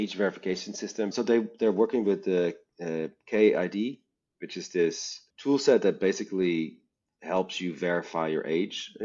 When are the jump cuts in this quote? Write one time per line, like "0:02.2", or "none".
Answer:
0:01.1